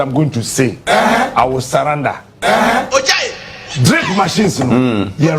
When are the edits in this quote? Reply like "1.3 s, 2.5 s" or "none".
2.9 s